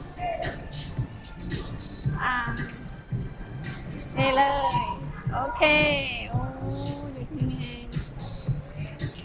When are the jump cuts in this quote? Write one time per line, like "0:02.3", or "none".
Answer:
none